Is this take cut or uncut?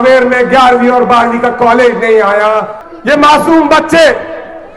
cut